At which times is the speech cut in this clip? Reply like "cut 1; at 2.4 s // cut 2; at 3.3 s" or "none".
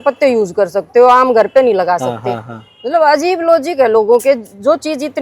none